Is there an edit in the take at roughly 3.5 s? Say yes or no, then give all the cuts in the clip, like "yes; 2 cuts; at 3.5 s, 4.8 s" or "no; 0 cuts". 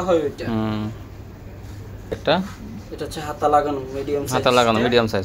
no; 1 cut; at 2.2 s